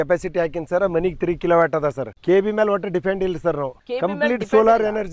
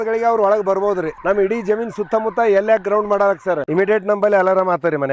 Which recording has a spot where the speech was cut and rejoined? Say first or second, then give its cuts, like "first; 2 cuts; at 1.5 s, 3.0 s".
second; 2 cuts; at 1.1 s, 3.6 s